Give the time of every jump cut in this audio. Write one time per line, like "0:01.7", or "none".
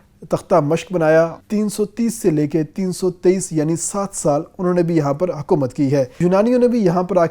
0:01.4
0:06.1